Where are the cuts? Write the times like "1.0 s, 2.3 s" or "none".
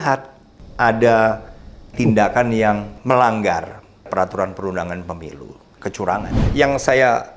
1.9 s, 2.9 s, 5.9 s